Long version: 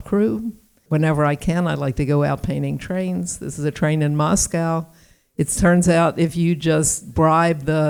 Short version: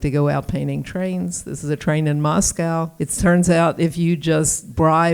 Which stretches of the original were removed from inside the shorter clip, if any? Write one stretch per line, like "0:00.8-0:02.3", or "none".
0:05.0-0:05.4